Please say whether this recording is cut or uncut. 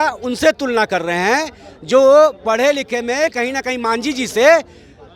uncut